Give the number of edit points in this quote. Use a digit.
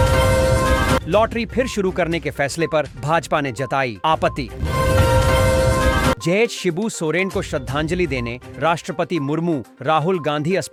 0